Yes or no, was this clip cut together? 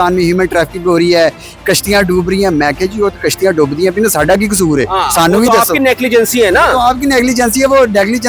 no